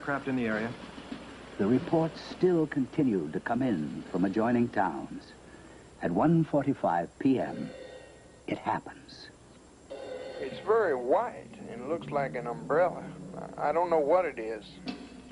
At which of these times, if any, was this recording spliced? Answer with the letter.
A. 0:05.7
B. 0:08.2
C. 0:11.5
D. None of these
C